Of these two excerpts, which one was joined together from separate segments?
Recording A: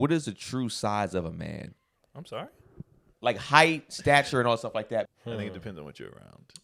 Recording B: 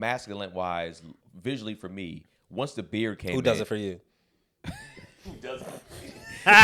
A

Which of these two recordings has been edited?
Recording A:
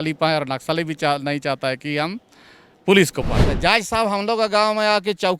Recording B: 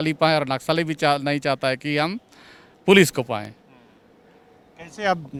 A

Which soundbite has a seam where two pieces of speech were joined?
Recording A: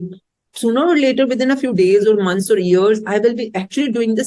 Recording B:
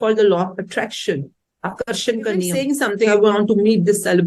B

